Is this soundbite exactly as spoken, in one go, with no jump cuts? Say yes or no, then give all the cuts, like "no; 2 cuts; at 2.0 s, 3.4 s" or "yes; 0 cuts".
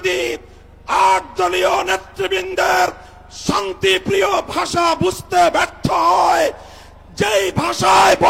yes; 0 cuts